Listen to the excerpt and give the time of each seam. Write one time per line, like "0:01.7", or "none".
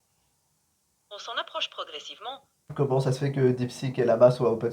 0:02.7